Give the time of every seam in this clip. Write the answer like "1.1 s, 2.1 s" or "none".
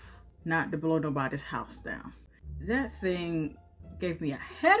2.4 s

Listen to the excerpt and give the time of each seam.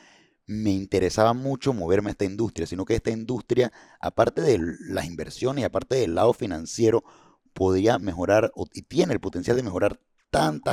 none

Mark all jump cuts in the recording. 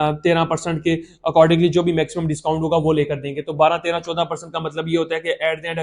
none

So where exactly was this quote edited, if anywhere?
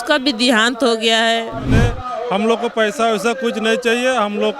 1.7 s

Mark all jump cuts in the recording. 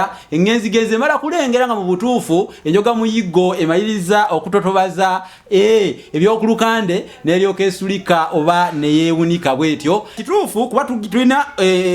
10.2 s

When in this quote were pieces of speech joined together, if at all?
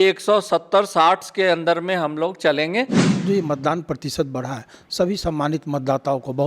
3.0 s

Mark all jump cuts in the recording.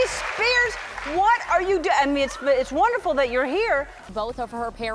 4.0 s

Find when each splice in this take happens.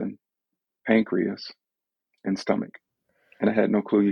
3.1 s

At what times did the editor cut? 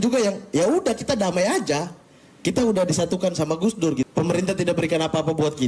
4.1 s

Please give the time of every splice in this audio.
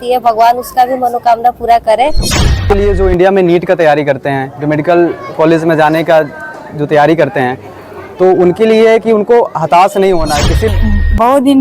2.7 s, 10.7 s

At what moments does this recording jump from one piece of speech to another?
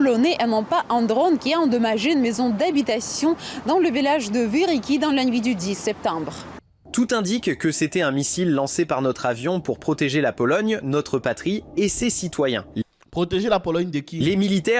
none

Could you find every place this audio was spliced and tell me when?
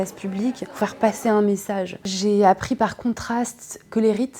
1.9 s

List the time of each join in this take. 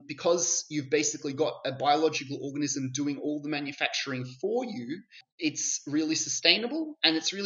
none

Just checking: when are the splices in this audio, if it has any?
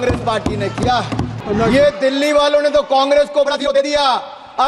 1.3 s

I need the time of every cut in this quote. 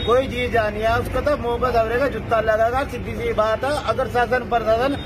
none

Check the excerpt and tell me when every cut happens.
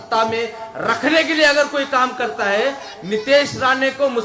none

